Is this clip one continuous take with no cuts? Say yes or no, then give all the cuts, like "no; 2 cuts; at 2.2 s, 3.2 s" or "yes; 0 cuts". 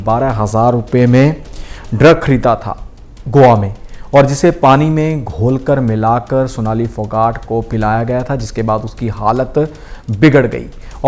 yes; 0 cuts